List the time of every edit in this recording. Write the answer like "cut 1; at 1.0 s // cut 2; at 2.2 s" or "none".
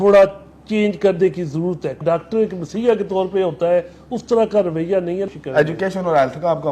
cut 1; at 2.0 s // cut 2; at 5.3 s